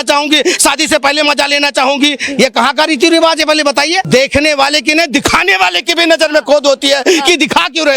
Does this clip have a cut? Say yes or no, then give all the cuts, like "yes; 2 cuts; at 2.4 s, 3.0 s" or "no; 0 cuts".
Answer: yes; 1 cut; at 4.1 s